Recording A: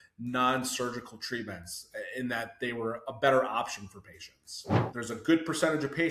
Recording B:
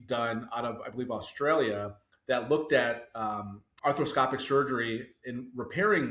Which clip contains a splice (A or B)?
A